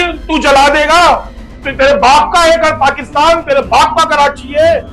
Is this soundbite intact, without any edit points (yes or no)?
no